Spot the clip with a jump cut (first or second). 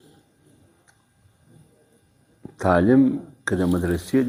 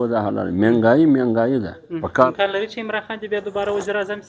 second